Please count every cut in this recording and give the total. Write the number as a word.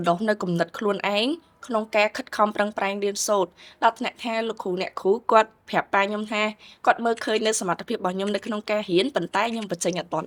zero